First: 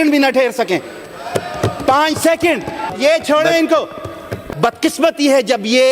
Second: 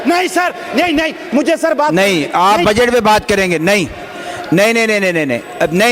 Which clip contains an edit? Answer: first; 2 cuts; at 2.9 s, 4.4 s

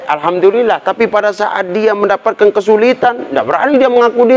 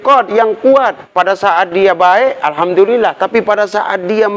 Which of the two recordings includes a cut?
second; 1 cut; at 1.0 s

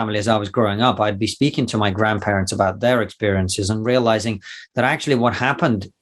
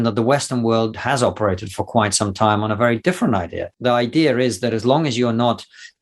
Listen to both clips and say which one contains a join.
second; 2 cuts; at 0.9 s, 3.6 s

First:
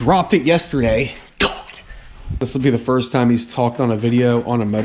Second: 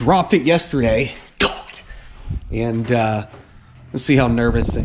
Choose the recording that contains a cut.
first; 1 cut; at 2.4 s

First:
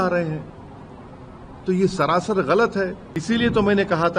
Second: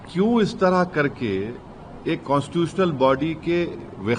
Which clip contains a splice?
first; 1 cut; at 3.1 s

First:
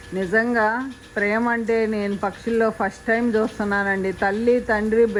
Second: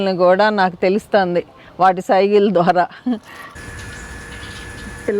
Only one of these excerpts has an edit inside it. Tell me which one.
second; 1 cut; at 3.6 s

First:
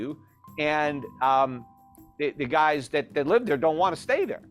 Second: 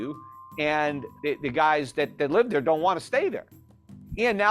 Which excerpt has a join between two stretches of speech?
second; 1 cut; at 1.1 s

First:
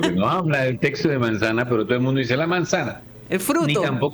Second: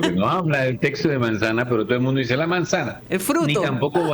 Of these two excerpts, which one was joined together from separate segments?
second; 1 cut; at 3.0 s

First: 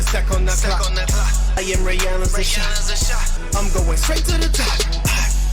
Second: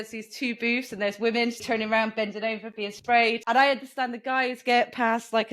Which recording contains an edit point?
second; 2 cuts; at 1.6 s, 3.4 s

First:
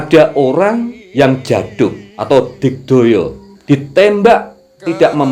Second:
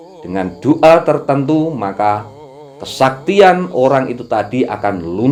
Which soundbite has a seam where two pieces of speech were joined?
first; 3 cuts; at 1.0 s, 2.1 s, 3.5 s

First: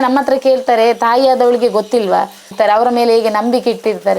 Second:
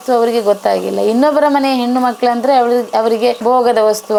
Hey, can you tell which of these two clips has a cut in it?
first; 1 cut; at 2.5 s

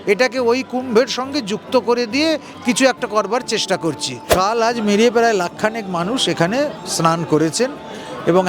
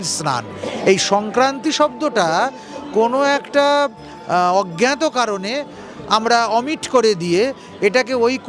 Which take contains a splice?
first; 1 cut; at 4.1 s

